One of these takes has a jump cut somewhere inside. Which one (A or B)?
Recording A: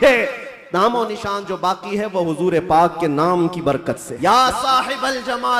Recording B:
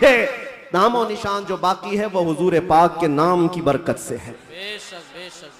A